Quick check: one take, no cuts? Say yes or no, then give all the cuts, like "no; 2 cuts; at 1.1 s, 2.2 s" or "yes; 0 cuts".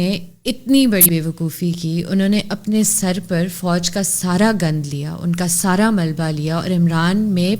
no; 1 cut; at 1.0 s